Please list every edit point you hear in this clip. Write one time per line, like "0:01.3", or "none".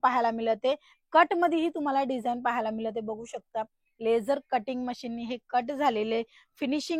none